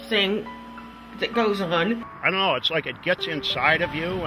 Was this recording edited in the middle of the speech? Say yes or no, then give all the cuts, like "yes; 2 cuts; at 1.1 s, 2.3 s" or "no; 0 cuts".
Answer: yes; 1 cut; at 2.1 s